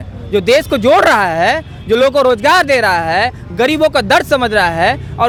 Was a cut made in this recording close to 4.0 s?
no; 0 cuts

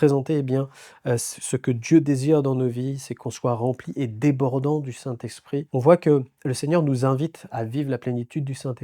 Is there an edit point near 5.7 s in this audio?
yes; 1 cut; at 5.7 s

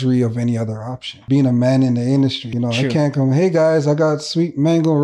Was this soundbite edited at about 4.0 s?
no; 2 cuts; at 1.1 s, 2.5 s

